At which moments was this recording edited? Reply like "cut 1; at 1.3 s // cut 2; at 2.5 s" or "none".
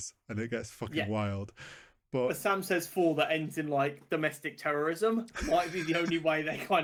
none